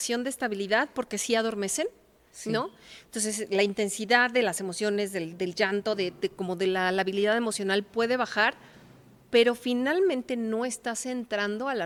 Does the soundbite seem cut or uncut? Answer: uncut